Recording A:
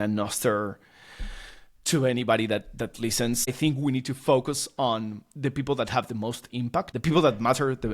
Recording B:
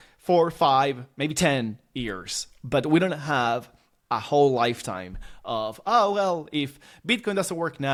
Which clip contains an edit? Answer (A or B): A